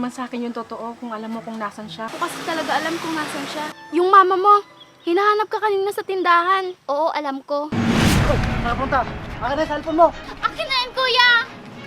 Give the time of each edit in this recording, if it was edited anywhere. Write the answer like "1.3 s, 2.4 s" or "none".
2.1 s, 3.8 s, 6.8 s, 7.7 s